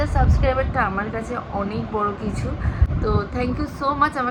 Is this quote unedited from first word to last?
yes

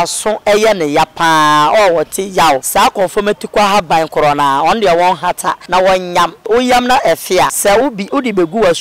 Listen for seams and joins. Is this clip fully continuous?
no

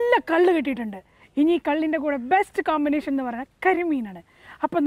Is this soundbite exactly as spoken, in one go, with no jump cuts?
yes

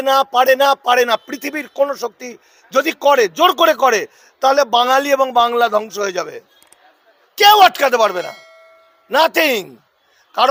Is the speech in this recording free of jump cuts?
yes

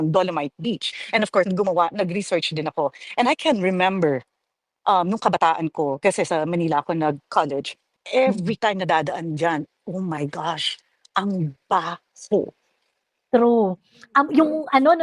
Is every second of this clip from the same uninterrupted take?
yes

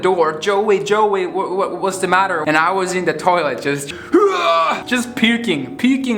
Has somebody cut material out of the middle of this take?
yes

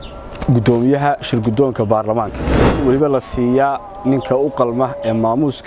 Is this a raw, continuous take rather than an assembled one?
no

